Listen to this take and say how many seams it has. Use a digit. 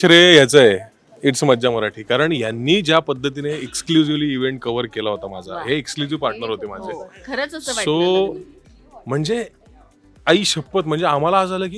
0